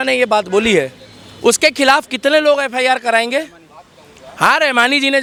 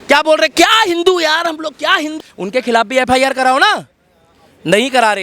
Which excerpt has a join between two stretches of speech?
second; 1 cut; at 2.1 s

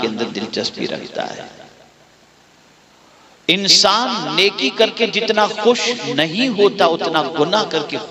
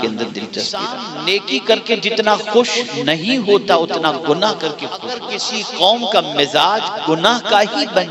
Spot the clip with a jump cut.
second; 2 cuts; at 1.0 s, 5.3 s

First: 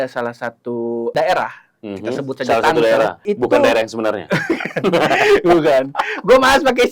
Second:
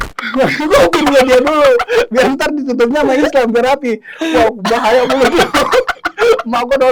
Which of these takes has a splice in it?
first; 2 cuts; at 1.1 s, 3.2 s

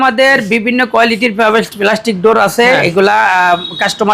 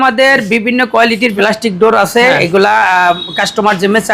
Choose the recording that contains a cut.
second; 1 cut; at 1.3 s

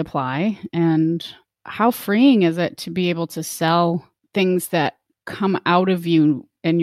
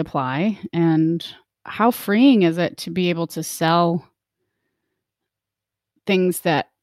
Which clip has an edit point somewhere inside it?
first; 1 cut; at 4.2 s

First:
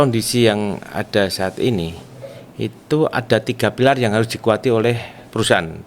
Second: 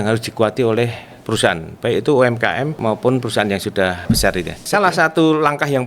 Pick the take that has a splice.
second; 2 cuts; at 2.8 s, 4.4 s

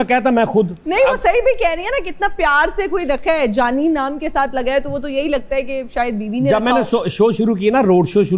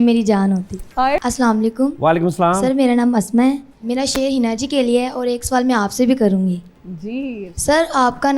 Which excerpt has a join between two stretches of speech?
second; 1 cut; at 1.2 s

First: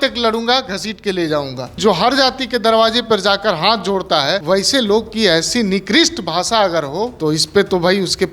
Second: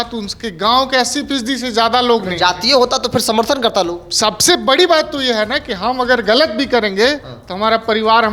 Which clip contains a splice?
first; 3 cuts; at 1.8 s, 4.4 s, 7.1 s

